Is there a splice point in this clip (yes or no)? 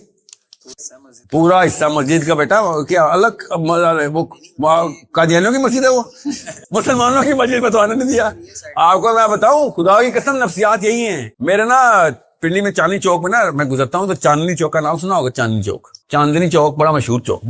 no